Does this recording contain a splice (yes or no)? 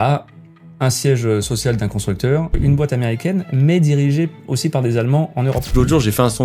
yes